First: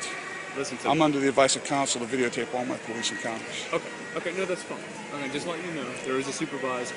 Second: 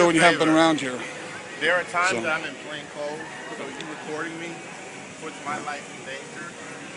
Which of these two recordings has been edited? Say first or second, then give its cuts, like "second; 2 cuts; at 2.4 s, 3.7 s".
second; 1 cut; at 3.3 s